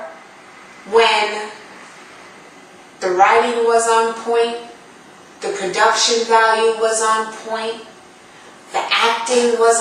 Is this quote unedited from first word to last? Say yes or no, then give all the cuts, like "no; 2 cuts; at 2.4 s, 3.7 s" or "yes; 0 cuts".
no; 1 cut; at 4.2 s